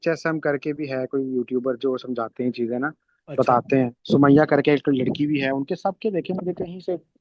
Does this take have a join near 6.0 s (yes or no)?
no